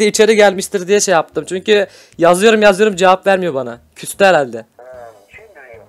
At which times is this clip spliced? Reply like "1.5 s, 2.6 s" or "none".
4.7 s